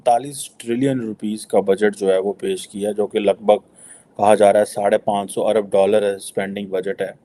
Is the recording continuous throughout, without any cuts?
yes; 0 cuts

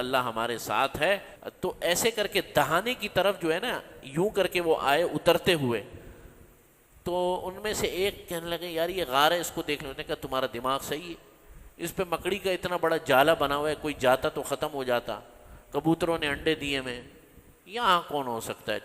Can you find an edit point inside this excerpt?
yes; 1 cut; at 1.3 s

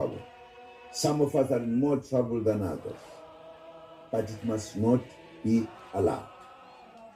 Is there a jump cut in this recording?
yes; 1 cut; at 6.2 s

